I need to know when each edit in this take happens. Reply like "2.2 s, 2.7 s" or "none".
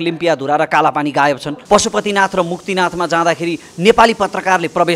1.5 s

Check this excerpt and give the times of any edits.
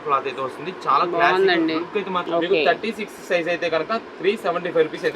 2.2 s

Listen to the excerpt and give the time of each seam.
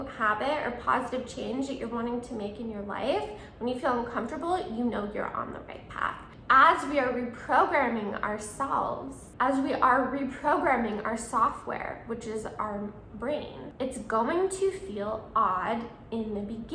6.3 s, 9.2 s, 13.6 s

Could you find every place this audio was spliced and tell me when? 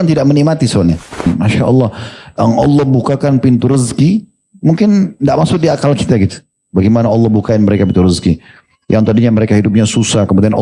1.3 s

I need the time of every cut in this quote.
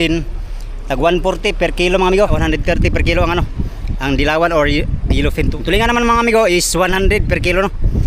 2.4 s, 5.5 s

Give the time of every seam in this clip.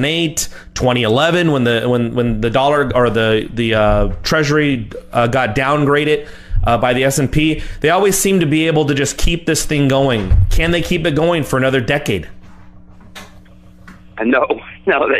none

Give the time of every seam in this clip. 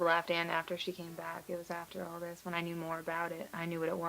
1.0 s

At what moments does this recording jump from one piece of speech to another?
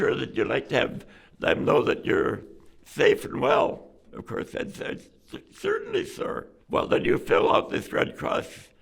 4.1 s, 6.5 s

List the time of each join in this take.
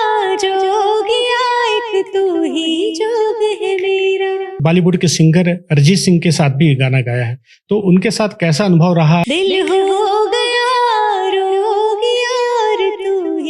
4.6 s, 9.2 s

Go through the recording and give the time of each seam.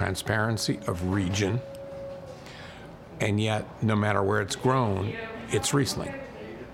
none

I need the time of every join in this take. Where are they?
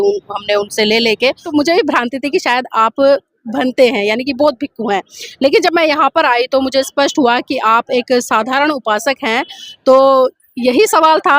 1.4 s

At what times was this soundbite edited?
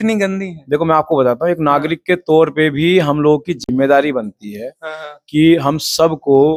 none

